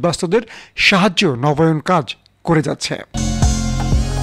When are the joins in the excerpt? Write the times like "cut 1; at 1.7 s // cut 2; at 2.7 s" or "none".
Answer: cut 1; at 3.2 s